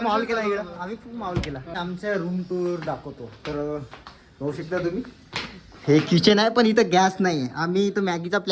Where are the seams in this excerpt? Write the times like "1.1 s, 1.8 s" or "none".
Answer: 1.7 s